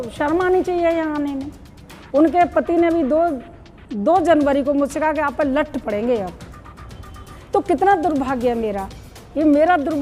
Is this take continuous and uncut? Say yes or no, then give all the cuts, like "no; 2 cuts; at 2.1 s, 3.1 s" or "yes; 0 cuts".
yes; 0 cuts